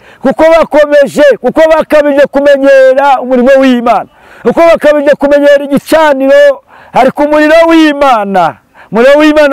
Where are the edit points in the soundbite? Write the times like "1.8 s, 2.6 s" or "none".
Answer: none